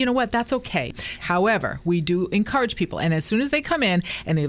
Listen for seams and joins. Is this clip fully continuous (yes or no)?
no